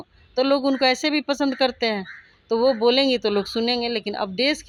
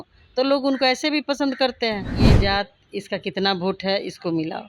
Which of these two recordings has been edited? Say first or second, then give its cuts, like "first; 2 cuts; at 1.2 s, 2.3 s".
second; 1 cut; at 2.3 s